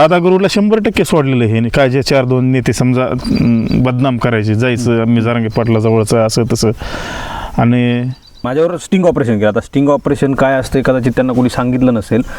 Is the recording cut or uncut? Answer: cut